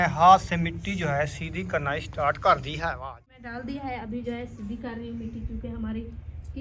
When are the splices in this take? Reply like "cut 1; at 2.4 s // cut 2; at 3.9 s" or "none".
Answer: cut 1; at 3.3 s